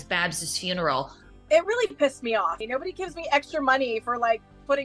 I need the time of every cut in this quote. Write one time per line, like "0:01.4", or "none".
0:01.3
0:02.6

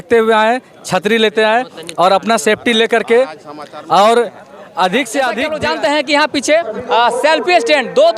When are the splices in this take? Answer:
0:05.5

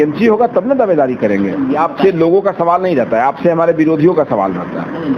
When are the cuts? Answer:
0:01.8

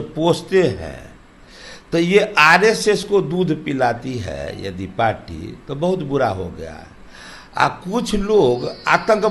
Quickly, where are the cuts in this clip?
none

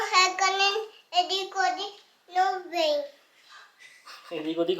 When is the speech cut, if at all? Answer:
none

